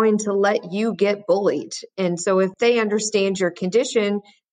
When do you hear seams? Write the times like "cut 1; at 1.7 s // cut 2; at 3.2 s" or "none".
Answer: cut 1; at 2.5 s